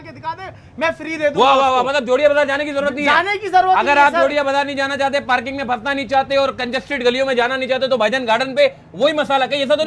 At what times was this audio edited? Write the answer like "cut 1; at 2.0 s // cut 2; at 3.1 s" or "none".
none